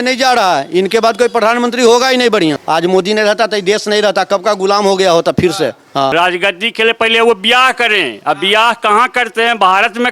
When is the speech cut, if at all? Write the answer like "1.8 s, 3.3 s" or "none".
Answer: 2.6 s, 6.1 s